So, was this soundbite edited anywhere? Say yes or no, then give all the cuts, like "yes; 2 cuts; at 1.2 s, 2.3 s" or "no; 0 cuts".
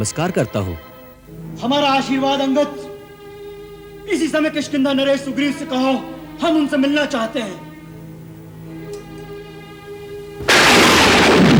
no; 0 cuts